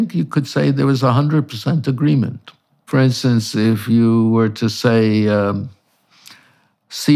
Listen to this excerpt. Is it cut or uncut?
cut